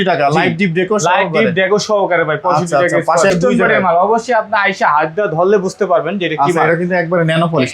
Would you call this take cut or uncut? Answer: cut